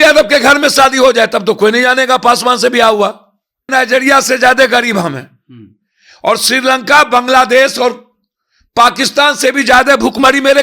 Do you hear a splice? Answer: yes; 1 cut; at 3.7 s

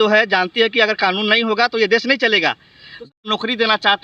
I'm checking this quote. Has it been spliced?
yes; 1 cut; at 3.1 s

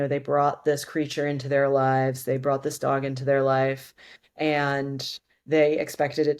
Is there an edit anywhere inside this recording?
no; 0 cuts

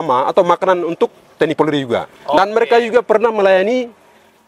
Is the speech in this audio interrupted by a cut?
no; 0 cuts

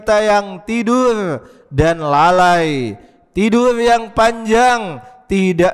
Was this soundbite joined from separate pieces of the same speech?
no; 0 cuts

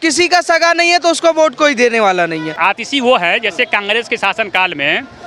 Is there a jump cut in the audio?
yes; 1 cut; at 2.5 s

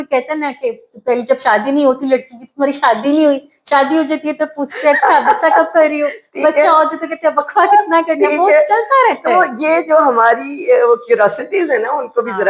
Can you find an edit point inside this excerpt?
no; 0 cuts

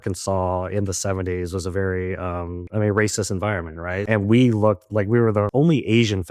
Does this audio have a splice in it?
yes; 1 cut; at 4.0 s

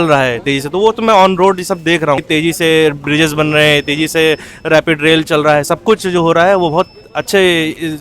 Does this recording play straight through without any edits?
no; 1 cut; at 2.2 s

